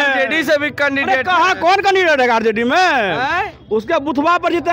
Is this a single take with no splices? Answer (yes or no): yes